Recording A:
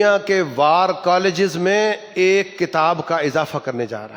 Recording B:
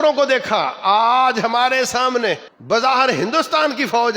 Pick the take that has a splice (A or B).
B